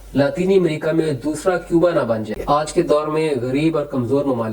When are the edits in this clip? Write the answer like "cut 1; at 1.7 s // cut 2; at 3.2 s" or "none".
cut 1; at 2.3 s